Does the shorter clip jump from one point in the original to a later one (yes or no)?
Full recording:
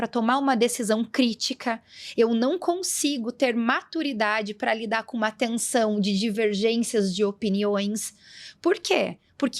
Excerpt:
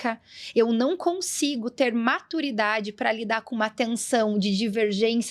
no